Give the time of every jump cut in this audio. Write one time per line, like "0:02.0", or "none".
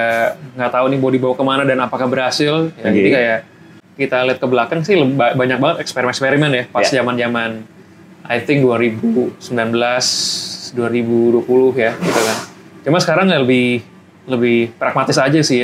0:03.8